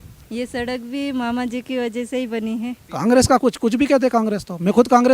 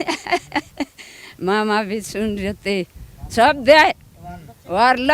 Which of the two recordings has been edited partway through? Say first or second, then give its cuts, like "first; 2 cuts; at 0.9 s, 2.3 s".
first; 1 cut; at 2.8 s